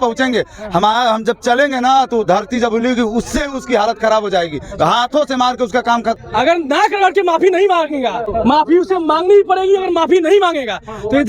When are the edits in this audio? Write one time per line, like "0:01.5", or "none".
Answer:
0:06.2